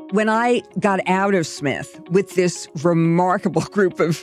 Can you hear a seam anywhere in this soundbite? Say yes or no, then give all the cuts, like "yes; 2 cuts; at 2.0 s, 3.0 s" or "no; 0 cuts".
no; 0 cuts